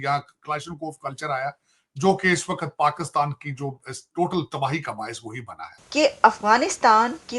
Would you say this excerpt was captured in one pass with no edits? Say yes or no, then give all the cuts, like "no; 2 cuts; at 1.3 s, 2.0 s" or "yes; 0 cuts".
no; 1 cut; at 5.8 s